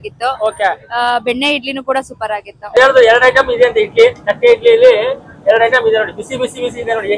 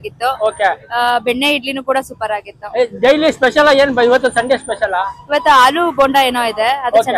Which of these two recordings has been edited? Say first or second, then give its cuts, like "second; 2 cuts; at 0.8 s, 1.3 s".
first; 1 cut; at 2.8 s